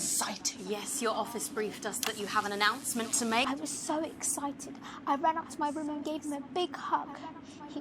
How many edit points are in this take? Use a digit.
1